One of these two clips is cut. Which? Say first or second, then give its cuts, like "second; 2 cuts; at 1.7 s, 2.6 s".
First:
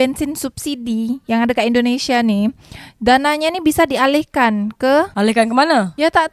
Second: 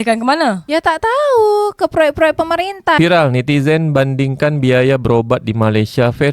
second; 1 cut; at 3.0 s